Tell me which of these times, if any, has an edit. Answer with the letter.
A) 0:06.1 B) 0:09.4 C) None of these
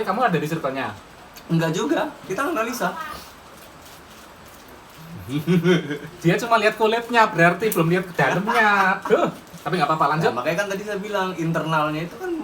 C